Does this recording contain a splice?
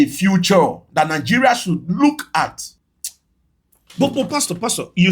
yes; 1 cut; at 2.7 s

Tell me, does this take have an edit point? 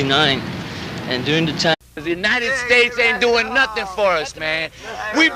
no; 0 cuts

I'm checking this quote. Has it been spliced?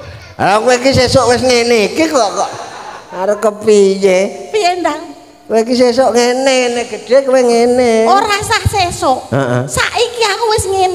no; 0 cuts

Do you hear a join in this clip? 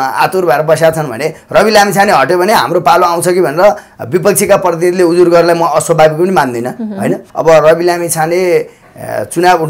yes; 1 cut; at 7.3 s

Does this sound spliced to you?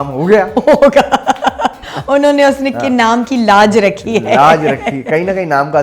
no; 0 cuts

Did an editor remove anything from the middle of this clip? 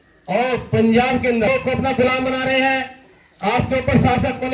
yes; 1 cut; at 1.5 s

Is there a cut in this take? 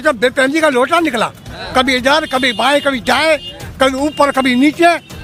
no; 0 cuts

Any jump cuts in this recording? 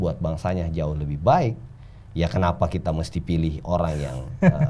no; 0 cuts

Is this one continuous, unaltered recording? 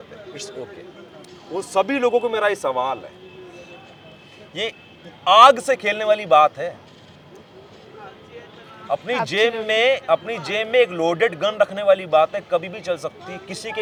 yes; 0 cuts

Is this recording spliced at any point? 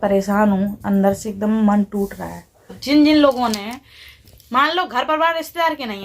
yes; 1 cut; at 2.8 s

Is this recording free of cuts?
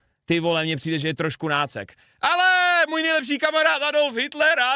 yes; 0 cuts

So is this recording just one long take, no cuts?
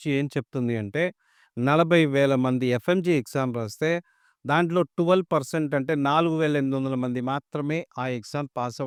yes; 0 cuts

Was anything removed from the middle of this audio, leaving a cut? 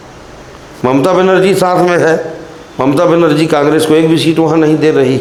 no; 0 cuts

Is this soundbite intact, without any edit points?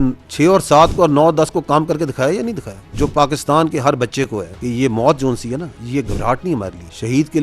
no; 1 cut; at 2.9 s

